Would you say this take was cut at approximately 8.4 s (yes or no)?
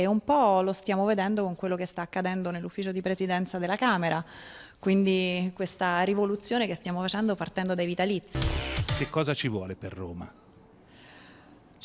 yes